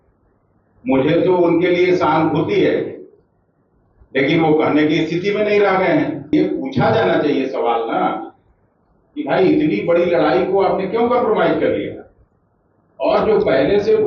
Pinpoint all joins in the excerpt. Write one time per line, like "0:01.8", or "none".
0:06.3